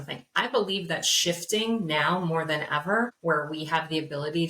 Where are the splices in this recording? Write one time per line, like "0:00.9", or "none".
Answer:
0:03.2